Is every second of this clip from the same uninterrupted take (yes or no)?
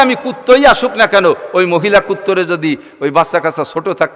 yes